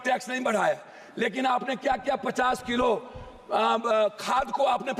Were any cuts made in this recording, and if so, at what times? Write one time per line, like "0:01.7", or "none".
none